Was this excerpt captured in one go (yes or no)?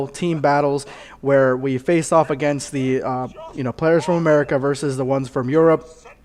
no